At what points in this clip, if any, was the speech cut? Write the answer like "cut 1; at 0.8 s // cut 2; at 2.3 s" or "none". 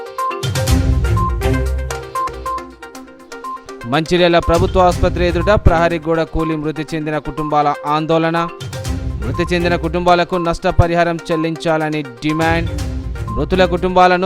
cut 1; at 2.1 s